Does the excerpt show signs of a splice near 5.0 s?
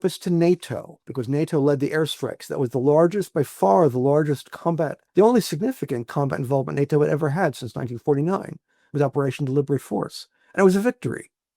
yes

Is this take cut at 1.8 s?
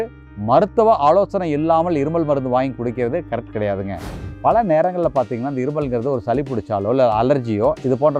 no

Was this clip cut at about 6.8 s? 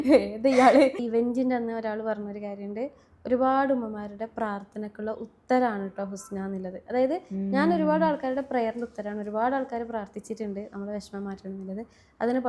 no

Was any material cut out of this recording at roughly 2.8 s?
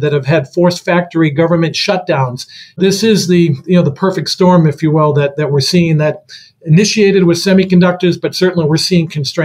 yes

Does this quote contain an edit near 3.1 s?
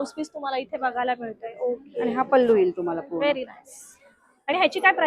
no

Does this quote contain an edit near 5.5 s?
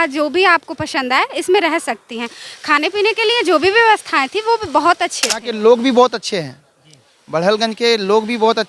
yes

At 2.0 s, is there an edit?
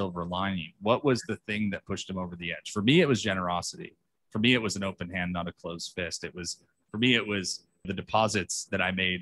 no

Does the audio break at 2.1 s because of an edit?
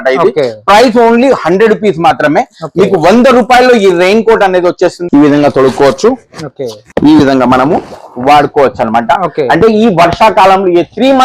no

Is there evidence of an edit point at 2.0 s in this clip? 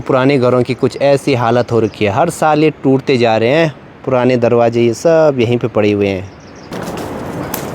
no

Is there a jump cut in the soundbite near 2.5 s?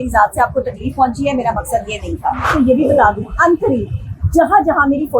yes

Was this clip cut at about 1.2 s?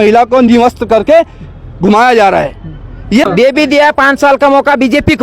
no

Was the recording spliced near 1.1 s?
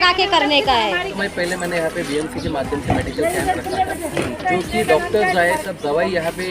yes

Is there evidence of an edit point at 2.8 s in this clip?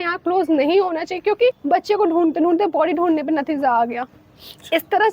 no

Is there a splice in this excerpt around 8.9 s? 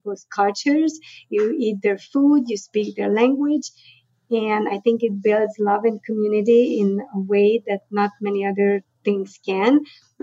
yes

